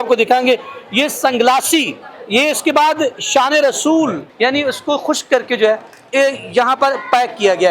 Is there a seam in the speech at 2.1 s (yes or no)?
no